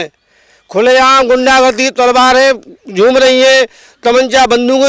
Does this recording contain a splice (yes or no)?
no